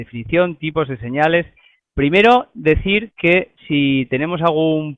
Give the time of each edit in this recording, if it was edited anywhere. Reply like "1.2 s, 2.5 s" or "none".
1.2 s